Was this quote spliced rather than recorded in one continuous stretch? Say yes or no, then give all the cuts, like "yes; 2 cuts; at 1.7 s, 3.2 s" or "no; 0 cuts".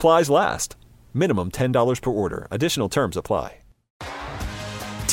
yes; 1 cut; at 4.0 s